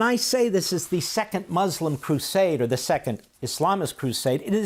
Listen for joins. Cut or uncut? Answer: uncut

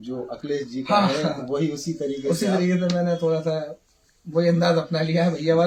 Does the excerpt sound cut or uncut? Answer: uncut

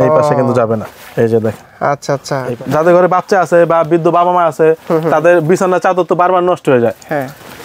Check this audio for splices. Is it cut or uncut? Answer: cut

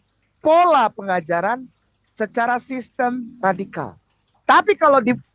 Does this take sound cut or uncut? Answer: uncut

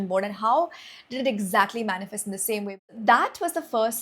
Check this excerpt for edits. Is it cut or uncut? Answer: cut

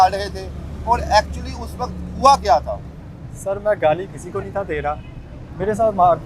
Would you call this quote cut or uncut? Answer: uncut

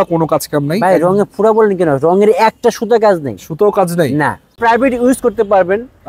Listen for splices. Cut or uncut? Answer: cut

